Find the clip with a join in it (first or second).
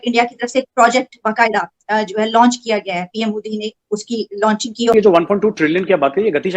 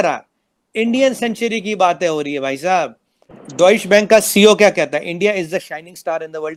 first